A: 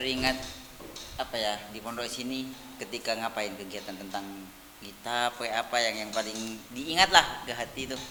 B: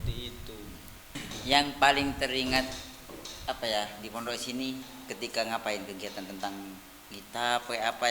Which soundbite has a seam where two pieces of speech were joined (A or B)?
B